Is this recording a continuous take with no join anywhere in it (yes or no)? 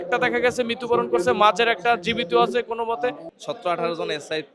no